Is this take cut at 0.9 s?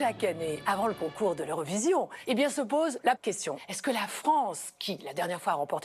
no; 2 cuts; at 2.2 s, 3.3 s

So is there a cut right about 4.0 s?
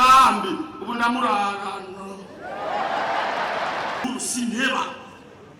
yes; 1 cut; at 4.0 s

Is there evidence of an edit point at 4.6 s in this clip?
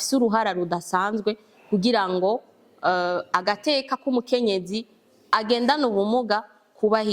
no; 0 cuts

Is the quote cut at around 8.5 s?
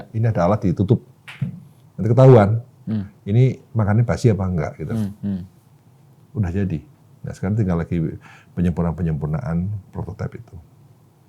no; 0 cuts

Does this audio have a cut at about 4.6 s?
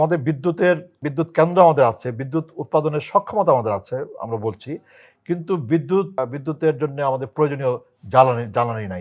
no; 2 cuts; at 1.0 s, 6.2 s

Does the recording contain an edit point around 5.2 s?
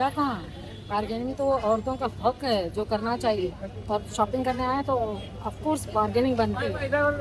no; 0 cuts

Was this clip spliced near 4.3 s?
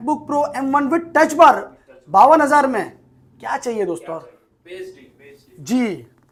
no; 0 cuts

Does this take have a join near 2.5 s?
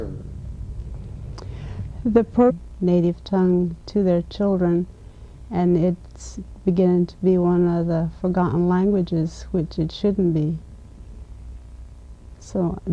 no; 0 cuts

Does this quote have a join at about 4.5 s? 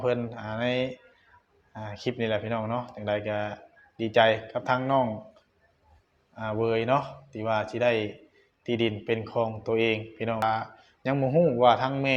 no; 1 cut; at 10.4 s

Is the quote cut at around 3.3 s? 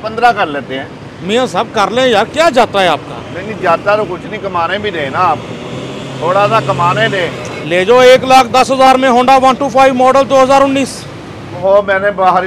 no; 2 cuts; at 7.5 s, 11.5 s

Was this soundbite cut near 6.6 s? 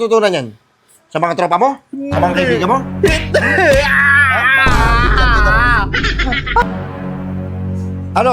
yes; 1 cut; at 6.6 s

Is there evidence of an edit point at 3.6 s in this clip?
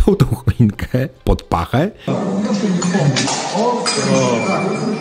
no; 1 cut; at 2.1 s

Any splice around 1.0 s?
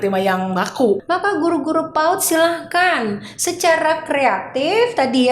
yes; 1 cut; at 1.0 s

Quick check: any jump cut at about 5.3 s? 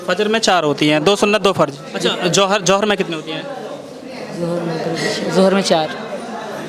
no; 1 cut; at 1.8 s

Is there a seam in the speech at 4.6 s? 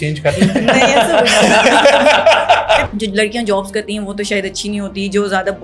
no; 1 cut; at 2.9 s

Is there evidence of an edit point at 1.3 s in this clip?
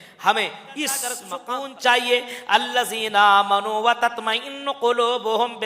yes; 1 cut; at 1.3 s

